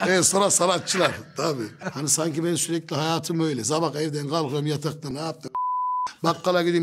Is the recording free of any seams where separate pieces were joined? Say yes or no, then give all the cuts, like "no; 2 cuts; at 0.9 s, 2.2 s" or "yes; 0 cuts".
no; 2 cuts; at 1.8 s, 5.1 s